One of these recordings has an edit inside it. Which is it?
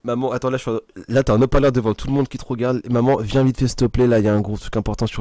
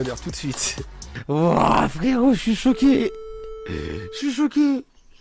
second; 1 cut; at 1.1 s

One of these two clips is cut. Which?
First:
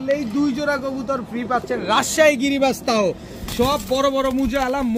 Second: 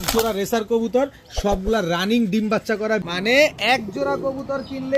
second; 1 cut; at 3.1 s

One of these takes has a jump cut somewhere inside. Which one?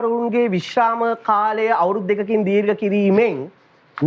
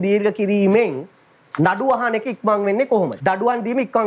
second; 1 cut; at 3.1 s

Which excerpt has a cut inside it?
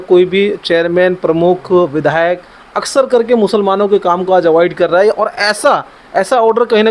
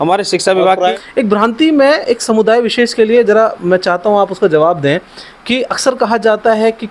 second; 1 cut; at 0.9 s

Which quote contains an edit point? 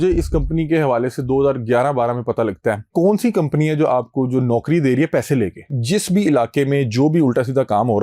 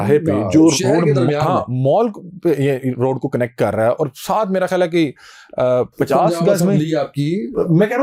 first; 2 cuts; at 2.9 s, 5.8 s

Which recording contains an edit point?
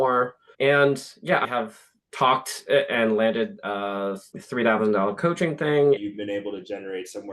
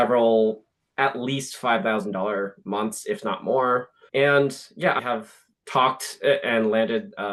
first; 1 cut; at 6.0 s

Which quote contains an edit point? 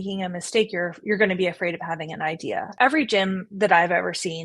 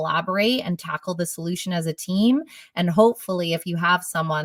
first; 1 cut; at 2.7 s

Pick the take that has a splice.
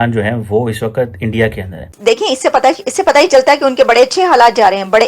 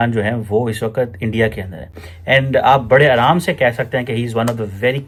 first; 1 cut; at 1.9 s

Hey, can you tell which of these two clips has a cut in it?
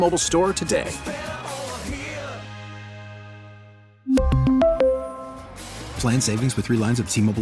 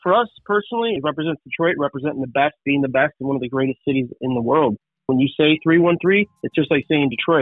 second; 3 cuts; at 1.0 s, 5.1 s, 6.4 s

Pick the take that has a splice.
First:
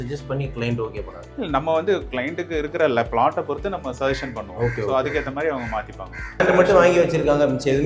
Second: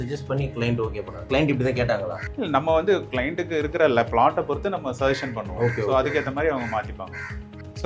first; 2 cuts; at 1.2 s, 6.4 s

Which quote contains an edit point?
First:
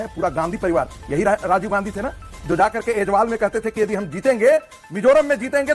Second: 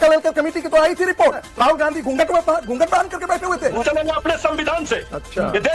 second; 2 cuts; at 1.5 s, 3.8 s

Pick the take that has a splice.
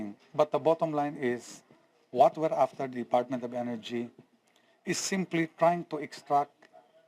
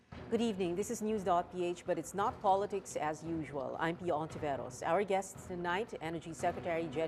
first; 1 cut; at 4.5 s

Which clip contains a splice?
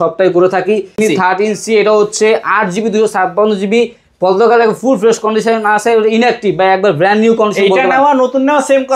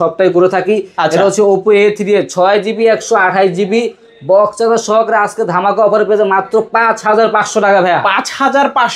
first; 1 cut; at 1.0 s

